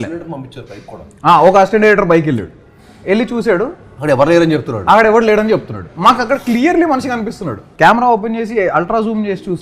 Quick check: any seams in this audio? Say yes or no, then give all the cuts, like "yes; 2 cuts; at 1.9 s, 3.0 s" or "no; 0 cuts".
yes; 1 cut; at 7.6 s